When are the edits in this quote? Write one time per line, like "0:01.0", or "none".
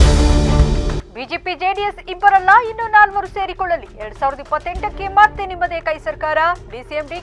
none